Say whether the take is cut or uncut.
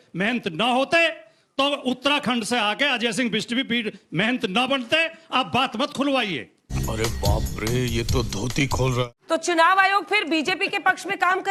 uncut